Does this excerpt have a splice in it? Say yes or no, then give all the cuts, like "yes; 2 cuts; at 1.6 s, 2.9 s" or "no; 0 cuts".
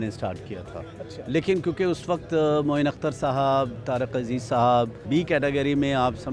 yes; 1 cut; at 5.0 s